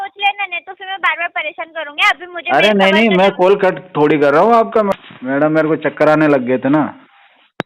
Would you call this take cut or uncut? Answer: cut